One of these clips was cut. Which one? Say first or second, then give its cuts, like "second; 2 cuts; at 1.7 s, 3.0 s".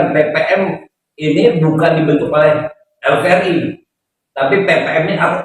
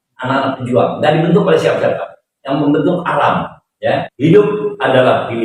second; 1 cut; at 4.1 s